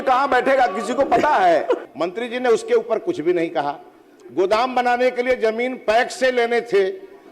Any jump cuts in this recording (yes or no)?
yes